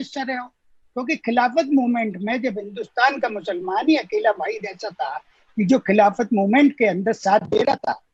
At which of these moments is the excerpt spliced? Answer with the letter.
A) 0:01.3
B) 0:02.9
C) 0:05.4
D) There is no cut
D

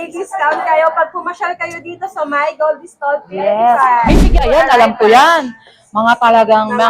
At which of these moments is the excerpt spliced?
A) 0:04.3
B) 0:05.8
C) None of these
A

